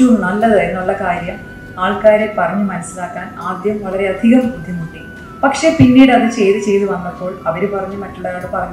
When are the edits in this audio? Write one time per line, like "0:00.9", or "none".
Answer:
none